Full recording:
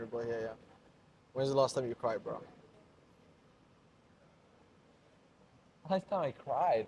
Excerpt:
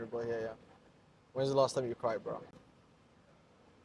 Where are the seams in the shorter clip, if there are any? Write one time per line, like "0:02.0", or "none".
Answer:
0:02.5